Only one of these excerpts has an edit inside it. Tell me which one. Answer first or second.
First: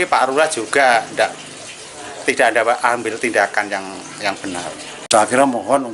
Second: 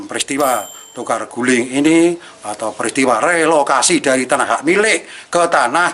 first